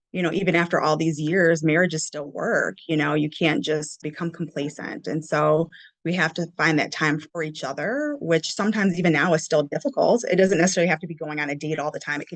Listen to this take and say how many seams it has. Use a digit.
2